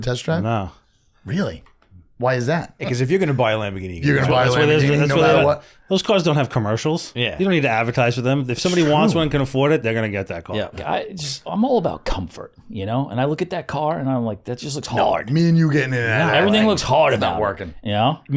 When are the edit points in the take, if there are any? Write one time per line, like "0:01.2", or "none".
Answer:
0:02.7
0:10.8